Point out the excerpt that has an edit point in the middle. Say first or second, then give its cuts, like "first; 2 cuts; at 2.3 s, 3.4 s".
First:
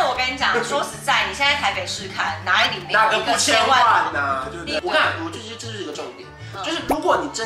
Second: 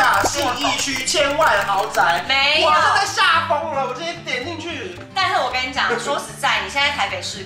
first; 1 cut; at 4.8 s